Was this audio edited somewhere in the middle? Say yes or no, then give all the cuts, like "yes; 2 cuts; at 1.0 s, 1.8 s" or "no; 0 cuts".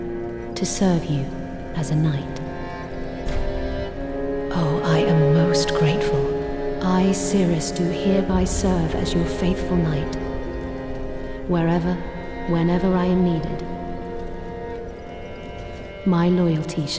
yes; 1 cut; at 8.5 s